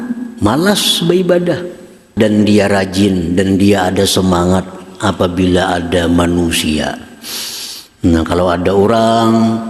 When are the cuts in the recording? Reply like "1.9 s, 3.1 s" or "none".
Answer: 2.0 s